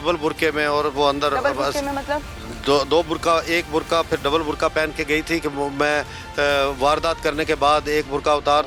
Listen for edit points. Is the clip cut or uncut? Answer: uncut